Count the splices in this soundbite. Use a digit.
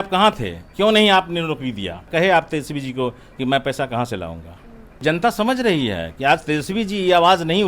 2